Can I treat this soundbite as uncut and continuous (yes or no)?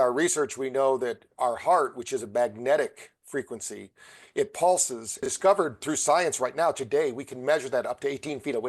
no